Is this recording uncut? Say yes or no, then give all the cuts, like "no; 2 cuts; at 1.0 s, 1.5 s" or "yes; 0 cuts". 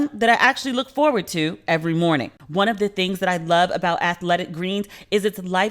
no; 1 cut; at 2.4 s